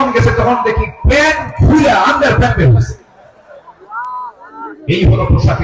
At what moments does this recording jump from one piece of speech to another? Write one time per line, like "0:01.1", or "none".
none